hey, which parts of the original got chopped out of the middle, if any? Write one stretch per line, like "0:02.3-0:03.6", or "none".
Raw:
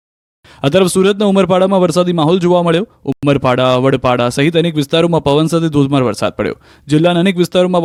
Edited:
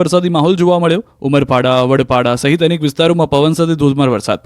0:03.0-0:03.1